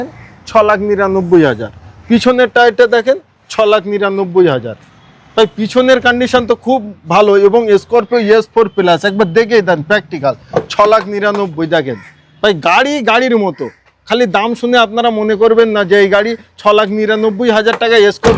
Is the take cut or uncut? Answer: uncut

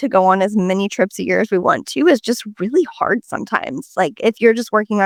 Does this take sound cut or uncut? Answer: uncut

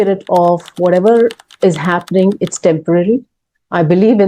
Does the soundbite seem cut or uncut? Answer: uncut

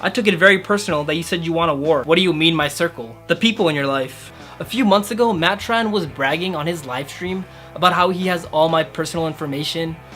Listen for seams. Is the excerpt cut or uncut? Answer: cut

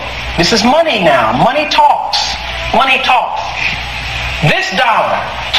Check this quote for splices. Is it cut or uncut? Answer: uncut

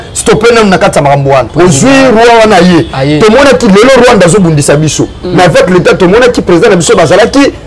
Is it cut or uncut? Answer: cut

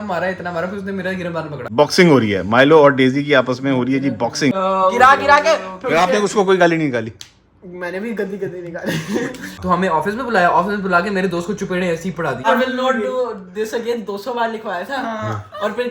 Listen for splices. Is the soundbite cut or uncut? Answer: cut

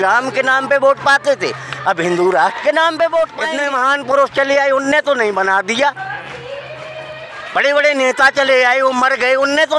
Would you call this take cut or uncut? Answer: cut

